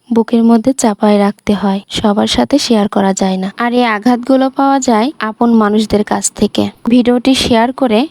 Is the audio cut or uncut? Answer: cut